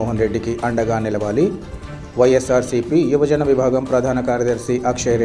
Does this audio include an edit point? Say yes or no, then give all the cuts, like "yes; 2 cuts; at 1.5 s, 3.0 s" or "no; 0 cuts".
no; 0 cuts